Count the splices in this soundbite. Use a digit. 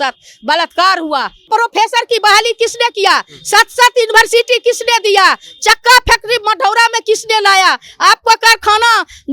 1